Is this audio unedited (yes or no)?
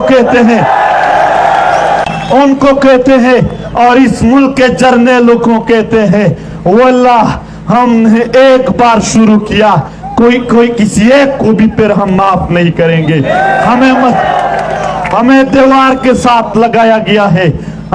no